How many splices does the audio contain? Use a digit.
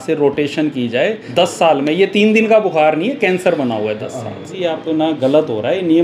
2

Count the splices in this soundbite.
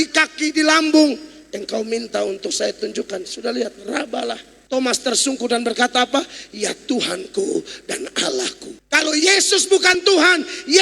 2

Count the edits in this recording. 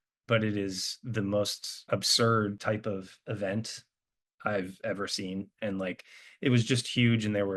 2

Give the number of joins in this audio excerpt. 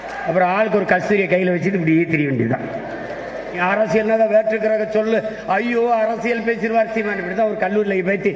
1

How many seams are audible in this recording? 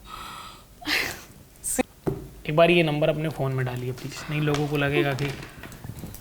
1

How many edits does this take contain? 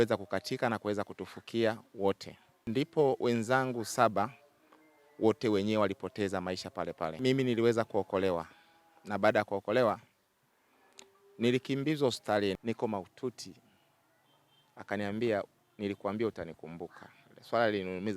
3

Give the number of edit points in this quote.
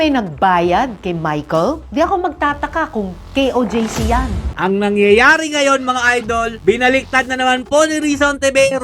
1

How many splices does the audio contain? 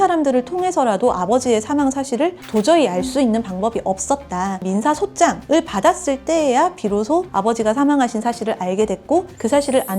1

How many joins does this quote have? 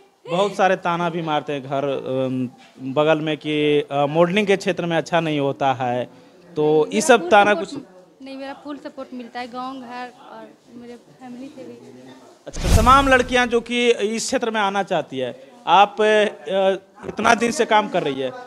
1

